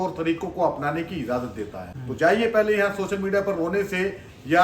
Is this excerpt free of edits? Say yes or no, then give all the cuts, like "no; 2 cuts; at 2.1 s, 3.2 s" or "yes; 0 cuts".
no; 1 cut; at 1.9 s